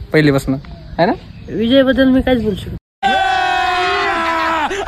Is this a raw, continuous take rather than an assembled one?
yes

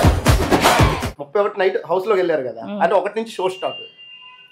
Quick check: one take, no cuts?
no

